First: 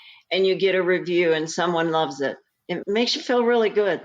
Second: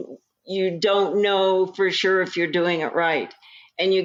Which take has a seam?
first; 1 cut; at 2.8 s

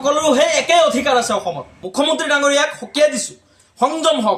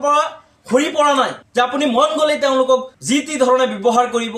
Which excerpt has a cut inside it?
first; 1 cut; at 1.8 s

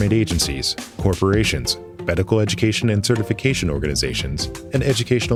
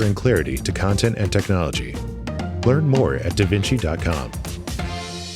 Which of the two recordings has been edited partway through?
second; 1 cut; at 4.3 s

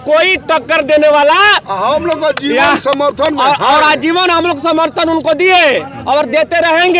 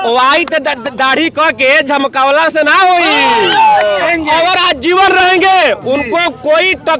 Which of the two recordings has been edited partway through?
second; 1 cut; at 4.1 s

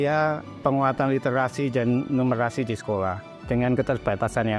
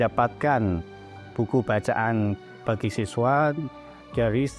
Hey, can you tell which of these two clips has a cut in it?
second; 1 cut; at 2.5 s

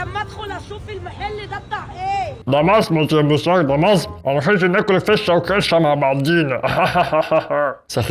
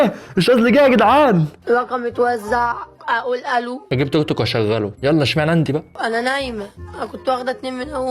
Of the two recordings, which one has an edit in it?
second; 2 cuts; at 1.5 s, 5.9 s

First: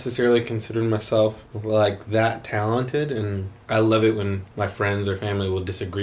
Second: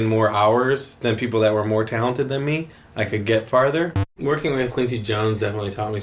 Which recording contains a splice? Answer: second; 1 cut; at 4.0 s

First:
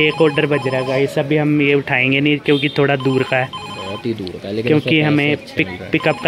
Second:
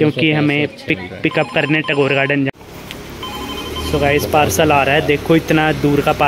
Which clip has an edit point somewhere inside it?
second; 1 cut; at 2.5 s

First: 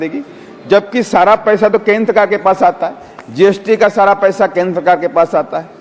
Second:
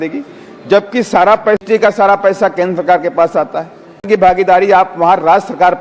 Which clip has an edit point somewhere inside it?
second; 2 cuts; at 1.6 s, 4.4 s

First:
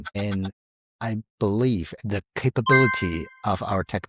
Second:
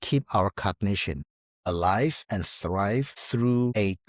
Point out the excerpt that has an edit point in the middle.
first; 1 cut; at 2.0 s

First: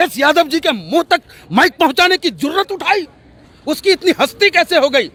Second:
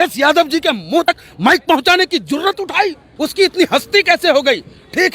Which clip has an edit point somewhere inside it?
second; 2 cuts; at 1.1 s, 3.0 s

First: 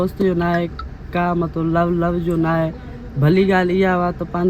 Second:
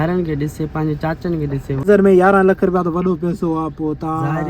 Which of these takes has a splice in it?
second; 1 cut; at 1.8 s

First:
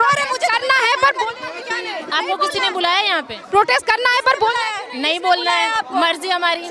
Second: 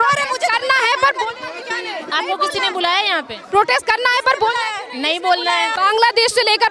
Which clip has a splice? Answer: second; 1 cut; at 5.7 s

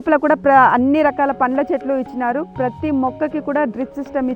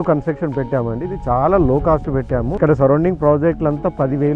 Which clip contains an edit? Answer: second; 1 cut; at 2.5 s

